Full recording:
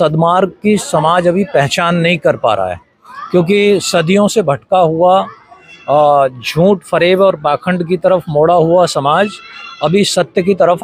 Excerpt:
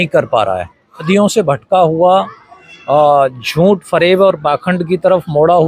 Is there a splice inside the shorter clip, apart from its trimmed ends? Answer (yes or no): yes